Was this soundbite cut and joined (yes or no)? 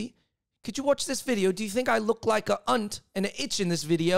no